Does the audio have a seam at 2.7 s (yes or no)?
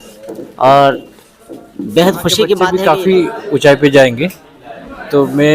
yes